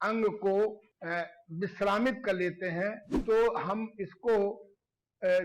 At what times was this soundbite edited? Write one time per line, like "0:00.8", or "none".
0:00.9
0:03.1